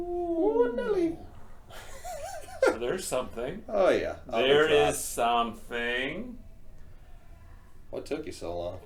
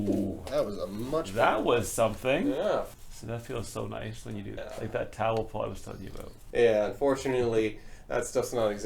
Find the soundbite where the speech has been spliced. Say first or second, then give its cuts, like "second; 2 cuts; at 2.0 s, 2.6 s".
second; 3 cuts; at 2.9 s, 4.6 s, 6.4 s